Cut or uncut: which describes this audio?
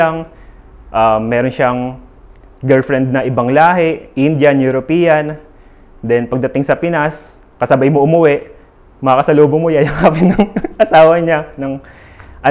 uncut